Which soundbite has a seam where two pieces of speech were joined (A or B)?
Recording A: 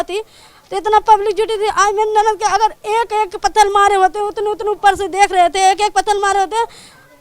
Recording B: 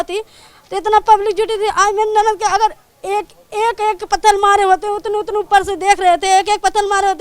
A